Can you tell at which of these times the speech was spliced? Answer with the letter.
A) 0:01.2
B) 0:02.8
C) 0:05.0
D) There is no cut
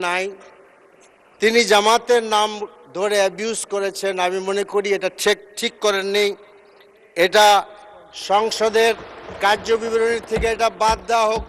D